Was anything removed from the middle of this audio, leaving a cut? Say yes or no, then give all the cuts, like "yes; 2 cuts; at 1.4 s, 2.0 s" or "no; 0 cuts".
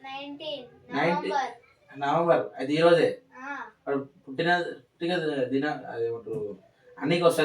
yes; 1 cut; at 4.6 s